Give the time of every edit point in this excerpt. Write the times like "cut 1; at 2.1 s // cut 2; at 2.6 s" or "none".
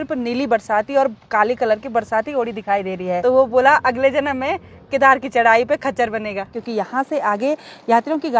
cut 1; at 3.2 s // cut 2; at 6.6 s